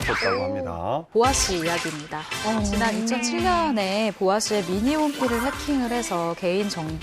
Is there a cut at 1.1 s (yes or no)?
yes